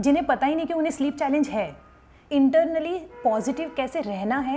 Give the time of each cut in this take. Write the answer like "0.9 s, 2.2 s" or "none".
2.2 s